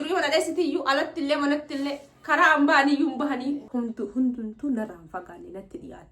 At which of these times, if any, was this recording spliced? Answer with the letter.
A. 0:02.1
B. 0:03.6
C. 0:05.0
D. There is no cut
B